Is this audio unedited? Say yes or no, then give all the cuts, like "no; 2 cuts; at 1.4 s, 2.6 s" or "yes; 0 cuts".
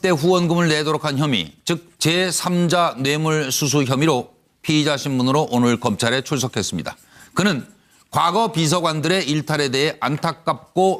yes; 0 cuts